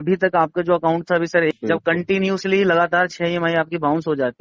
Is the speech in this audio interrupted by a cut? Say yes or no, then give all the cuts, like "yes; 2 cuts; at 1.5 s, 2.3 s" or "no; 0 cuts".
yes; 1 cut; at 1.5 s